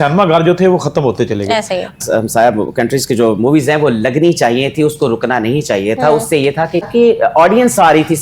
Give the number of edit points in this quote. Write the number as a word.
two